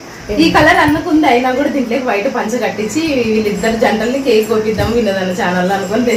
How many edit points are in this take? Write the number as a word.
zero